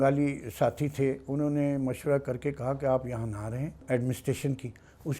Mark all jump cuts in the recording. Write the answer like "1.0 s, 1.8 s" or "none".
3.8 s

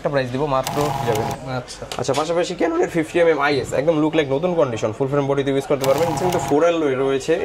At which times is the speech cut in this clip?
1.0 s, 6.1 s

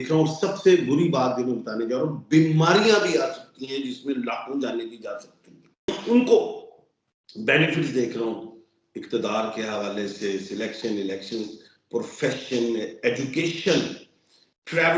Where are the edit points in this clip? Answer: 5.8 s

